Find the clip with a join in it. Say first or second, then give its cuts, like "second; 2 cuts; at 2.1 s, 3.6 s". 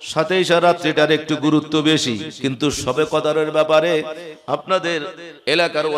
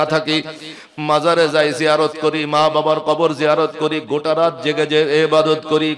first; 1 cut; at 2.3 s